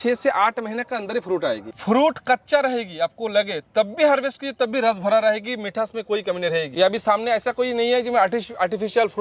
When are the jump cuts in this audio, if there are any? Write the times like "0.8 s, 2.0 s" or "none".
1.7 s, 6.7 s

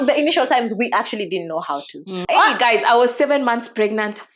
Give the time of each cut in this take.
2.2 s

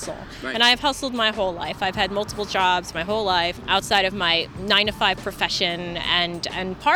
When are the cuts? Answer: 3.6 s

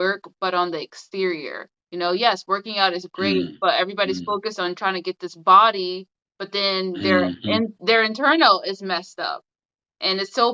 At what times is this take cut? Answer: none

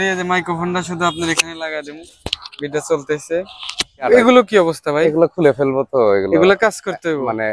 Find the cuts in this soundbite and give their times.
4.1 s

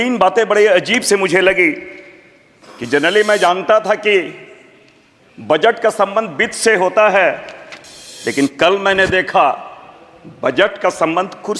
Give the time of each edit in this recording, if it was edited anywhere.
none

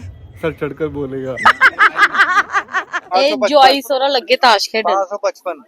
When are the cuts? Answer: 3.1 s

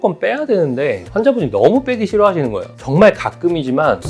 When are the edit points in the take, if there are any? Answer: 2.7 s

